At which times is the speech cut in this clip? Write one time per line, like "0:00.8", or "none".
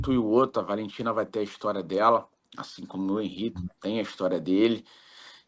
none